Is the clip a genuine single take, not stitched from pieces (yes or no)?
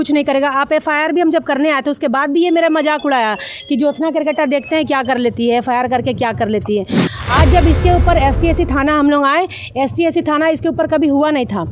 yes